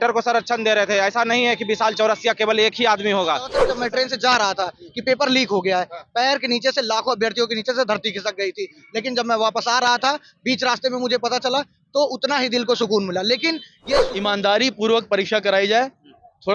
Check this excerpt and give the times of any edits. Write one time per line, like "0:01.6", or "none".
0:03.5
0:14.1